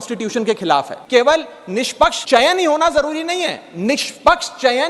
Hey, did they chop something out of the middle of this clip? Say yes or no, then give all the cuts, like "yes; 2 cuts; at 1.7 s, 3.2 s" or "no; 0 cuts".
yes; 2 cuts; at 1.0 s, 2.2 s